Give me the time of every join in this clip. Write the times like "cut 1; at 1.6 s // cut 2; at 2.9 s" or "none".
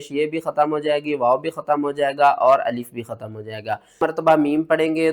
cut 1; at 4.0 s